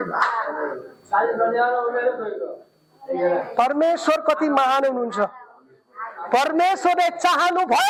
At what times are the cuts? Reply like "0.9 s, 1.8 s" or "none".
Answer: none